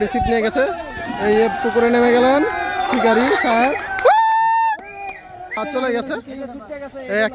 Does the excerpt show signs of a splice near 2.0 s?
no; 1 cut; at 5.6 s

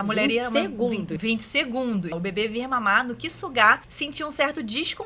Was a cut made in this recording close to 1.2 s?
yes; 3 cuts; at 1.2 s, 2.2 s, 4.0 s

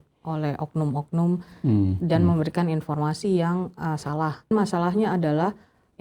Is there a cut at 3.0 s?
no; 1 cut; at 4.5 s

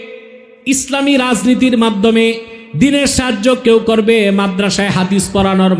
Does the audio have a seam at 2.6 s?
no; 0 cuts

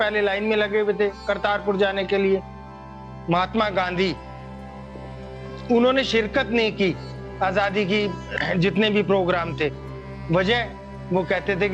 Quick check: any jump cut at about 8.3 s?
yes; 2 cuts; at 2.8 s, 8.3 s

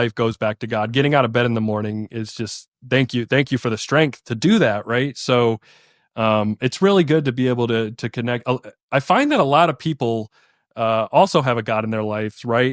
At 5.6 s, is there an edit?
no; 0 cuts

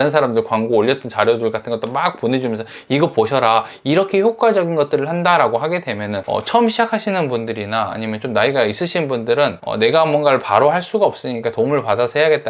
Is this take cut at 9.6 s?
no; 0 cuts

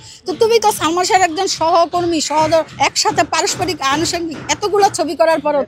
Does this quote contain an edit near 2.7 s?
yes; 1 cut; at 2.7 s

